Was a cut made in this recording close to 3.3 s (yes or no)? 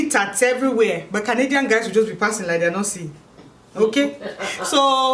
no